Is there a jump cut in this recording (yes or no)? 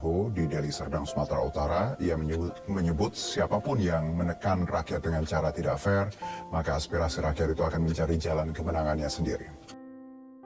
yes